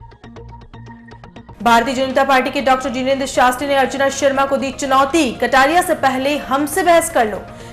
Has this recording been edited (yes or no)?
yes